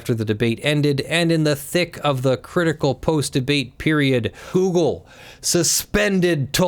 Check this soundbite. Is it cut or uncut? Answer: cut